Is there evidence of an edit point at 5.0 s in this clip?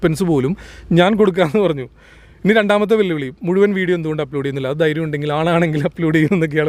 no; 0 cuts

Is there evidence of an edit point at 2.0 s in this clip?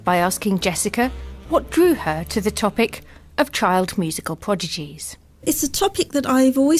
no; 0 cuts

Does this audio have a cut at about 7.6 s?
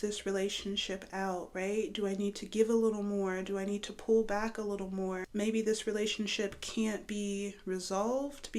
no; 1 cut; at 5.2 s

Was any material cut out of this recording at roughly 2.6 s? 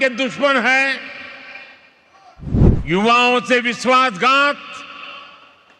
yes; 1 cut; at 2.6 s

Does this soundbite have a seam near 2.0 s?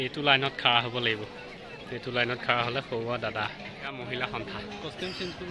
no; 1 cut; at 3.8 s

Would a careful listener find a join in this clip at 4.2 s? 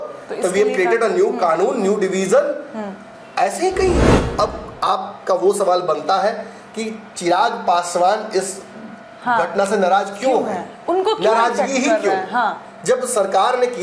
yes; 1 cut; at 4.2 s

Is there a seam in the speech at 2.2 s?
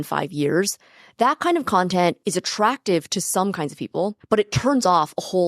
yes; 2 cuts; at 2.2 s, 4.2 s

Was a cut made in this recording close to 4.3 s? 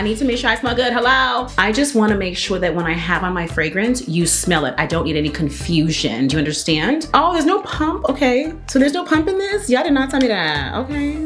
no; 2 cuts; at 1.5 s, 7.1 s

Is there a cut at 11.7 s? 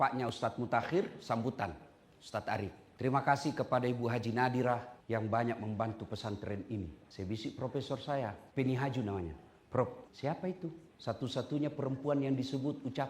no; 5 cuts; at 2.8 s, 4.9 s, 7.0 s, 8.4 s, 10.5 s

